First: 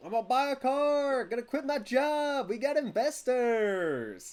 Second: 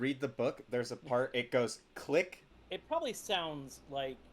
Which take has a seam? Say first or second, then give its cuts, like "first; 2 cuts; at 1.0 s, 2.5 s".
second; 1 cut; at 2.4 s